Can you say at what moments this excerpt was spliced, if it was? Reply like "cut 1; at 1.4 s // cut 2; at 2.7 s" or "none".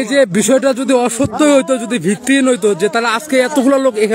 none